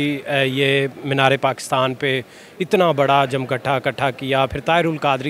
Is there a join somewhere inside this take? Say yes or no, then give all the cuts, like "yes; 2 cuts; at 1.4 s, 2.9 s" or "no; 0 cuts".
no; 0 cuts